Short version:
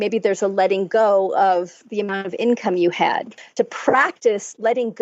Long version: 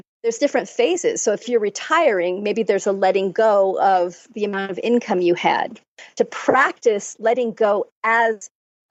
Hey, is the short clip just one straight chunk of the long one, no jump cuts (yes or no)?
no